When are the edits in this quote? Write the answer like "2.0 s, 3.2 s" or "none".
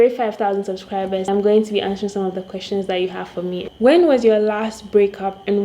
1.3 s, 3.6 s